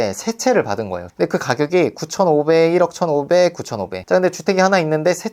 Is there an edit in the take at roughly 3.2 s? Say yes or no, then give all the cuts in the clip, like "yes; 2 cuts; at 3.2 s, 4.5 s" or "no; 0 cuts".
no; 1 cut; at 1.0 s